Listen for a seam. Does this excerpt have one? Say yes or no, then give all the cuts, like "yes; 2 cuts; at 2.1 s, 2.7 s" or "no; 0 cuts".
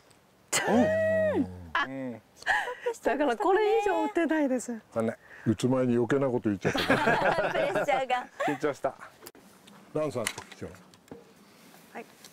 no; 0 cuts